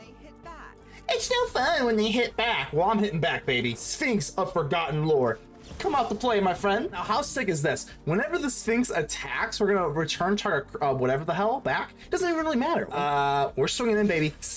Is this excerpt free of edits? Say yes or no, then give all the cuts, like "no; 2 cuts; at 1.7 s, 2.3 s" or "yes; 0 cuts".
no; 3 cuts; at 3.9 s, 7.0 s, 12.9 s